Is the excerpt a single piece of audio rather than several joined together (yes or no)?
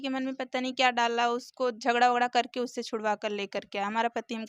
yes